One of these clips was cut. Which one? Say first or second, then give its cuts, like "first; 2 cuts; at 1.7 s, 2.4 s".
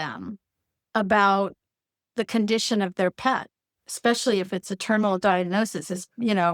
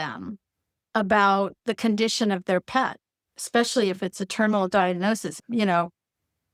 second; 2 cuts; at 1.6 s, 5.4 s